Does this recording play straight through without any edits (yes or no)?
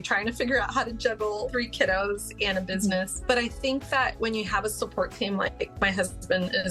yes